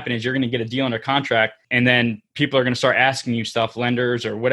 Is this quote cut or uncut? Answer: cut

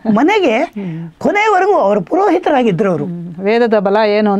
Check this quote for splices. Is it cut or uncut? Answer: uncut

